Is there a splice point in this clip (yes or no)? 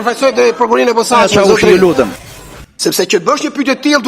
yes